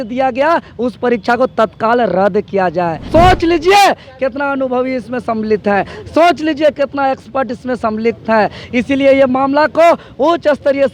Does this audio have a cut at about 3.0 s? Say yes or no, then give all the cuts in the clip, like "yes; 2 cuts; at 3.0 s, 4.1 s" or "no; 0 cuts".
yes; 1 cut; at 3.0 s